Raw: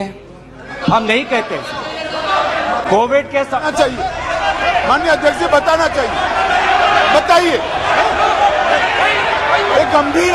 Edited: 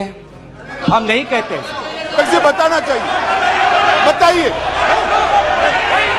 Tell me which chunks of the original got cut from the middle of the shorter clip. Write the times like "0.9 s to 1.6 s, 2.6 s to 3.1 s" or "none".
2.1 s to 5.2 s